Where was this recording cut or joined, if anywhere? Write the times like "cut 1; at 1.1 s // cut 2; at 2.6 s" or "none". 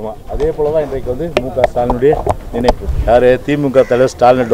cut 1; at 2.9 s